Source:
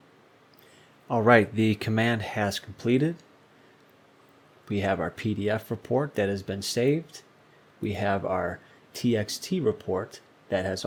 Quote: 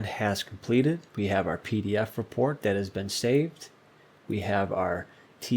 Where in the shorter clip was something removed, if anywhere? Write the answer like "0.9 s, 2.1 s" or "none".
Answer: 1.1 s